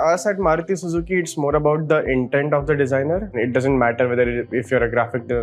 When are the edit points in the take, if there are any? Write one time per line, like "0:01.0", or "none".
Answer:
0:03.3